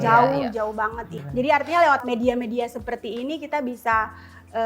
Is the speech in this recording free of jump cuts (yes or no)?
no